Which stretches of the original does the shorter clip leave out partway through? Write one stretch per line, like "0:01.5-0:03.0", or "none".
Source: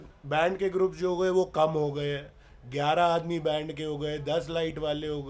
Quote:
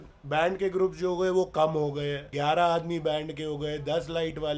0:02.2-0:02.6